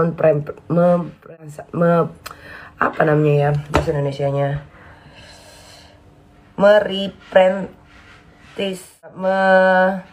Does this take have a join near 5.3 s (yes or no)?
no